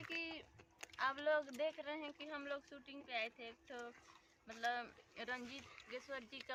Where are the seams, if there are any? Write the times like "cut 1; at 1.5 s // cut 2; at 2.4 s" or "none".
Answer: none